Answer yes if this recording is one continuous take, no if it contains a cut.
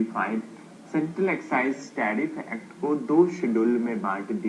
yes